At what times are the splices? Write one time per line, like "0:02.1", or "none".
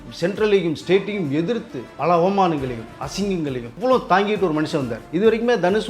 0:01.9
0:03.7
0:05.0